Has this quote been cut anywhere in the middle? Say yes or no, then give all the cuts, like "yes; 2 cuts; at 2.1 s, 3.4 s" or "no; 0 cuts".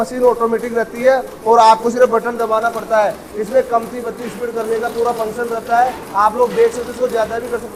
no; 0 cuts